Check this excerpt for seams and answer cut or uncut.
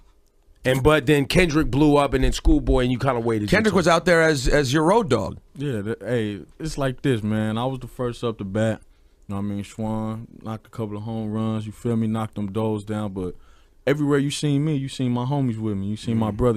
cut